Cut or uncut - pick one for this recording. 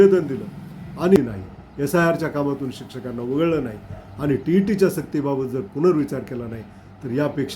cut